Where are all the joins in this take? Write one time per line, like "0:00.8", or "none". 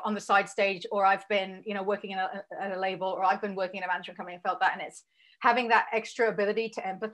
none